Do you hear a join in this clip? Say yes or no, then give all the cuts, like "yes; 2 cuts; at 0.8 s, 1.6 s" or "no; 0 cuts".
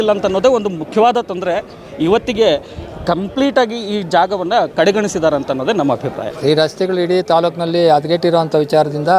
yes; 1 cut; at 6.3 s